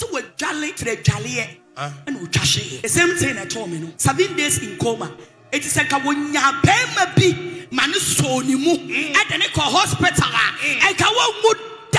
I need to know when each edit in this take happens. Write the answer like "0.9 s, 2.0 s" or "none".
0.8 s, 2.7 s, 3.9 s